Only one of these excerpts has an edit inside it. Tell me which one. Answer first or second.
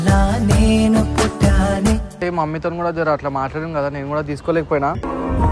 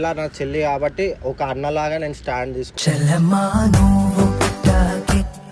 first